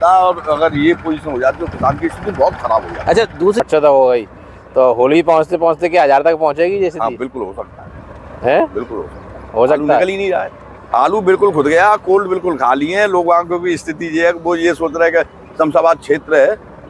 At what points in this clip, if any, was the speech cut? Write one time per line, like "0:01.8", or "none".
0:03.6